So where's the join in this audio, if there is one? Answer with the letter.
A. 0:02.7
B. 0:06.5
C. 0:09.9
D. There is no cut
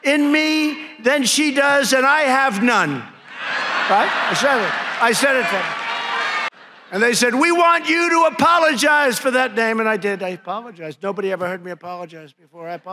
B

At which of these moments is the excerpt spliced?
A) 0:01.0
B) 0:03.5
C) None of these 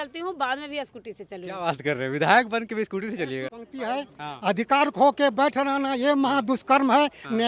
B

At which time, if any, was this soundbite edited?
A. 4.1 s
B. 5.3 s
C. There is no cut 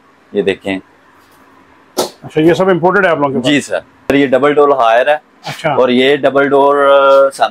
A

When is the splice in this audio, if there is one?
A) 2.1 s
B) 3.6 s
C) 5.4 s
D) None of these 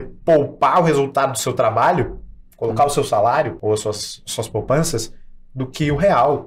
B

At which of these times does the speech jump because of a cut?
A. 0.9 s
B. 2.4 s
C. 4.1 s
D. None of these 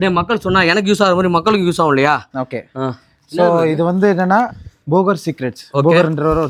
D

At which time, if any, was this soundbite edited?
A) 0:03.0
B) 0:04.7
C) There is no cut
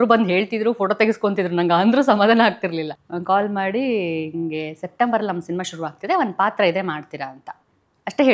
A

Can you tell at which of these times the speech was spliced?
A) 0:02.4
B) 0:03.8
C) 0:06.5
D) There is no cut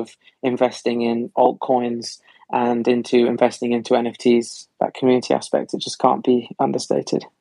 C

